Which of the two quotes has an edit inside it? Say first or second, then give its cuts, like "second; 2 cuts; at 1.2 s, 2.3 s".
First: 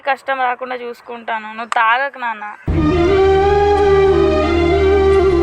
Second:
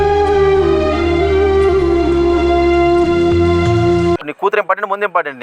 second; 1 cut; at 4.3 s